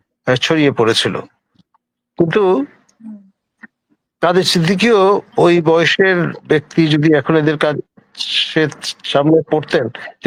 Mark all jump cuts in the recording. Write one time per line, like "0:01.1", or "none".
none